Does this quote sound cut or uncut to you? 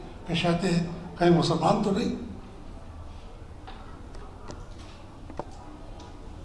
uncut